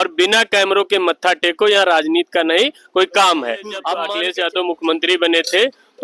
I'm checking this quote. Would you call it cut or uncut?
cut